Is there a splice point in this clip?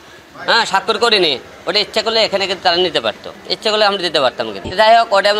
no; 0 cuts

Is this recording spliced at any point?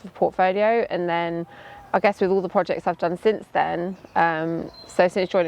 no; 0 cuts

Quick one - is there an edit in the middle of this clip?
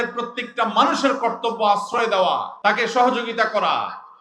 yes; 1 cut; at 2.5 s

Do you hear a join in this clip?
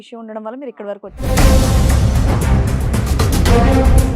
yes; 1 cut; at 1.2 s

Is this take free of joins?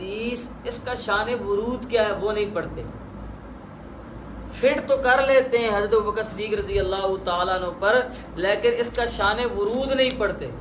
yes; 0 cuts

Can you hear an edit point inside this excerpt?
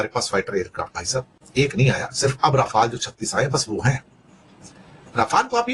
no; 0 cuts

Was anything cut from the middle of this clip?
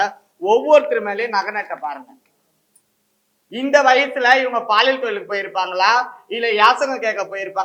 no; 0 cuts

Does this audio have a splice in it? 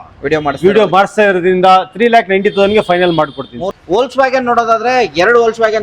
yes; 1 cut; at 3.6 s

